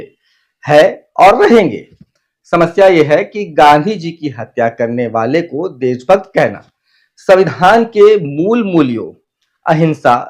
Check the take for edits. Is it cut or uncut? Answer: uncut